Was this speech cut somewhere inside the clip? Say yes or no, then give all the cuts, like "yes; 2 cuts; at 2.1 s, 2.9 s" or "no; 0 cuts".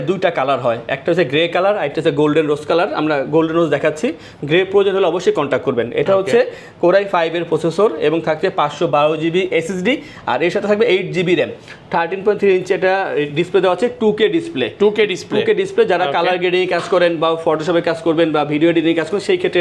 no; 0 cuts